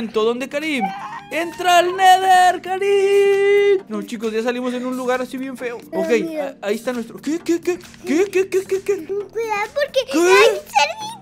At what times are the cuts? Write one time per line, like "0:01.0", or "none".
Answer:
0:03.8
0:05.8
0:09.1